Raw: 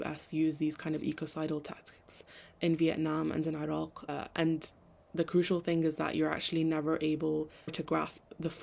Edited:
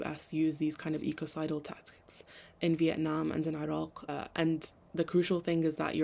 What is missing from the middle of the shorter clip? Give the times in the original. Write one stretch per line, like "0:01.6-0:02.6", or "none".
0:04.8-0:05.0